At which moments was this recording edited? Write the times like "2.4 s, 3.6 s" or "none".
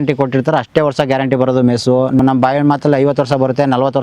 2.2 s